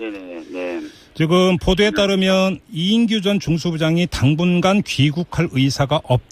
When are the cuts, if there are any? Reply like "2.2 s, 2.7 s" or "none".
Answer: 5.3 s